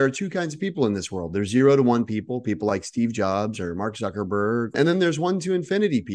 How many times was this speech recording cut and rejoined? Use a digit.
0